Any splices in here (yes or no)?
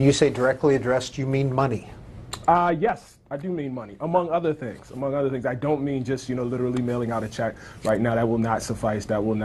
no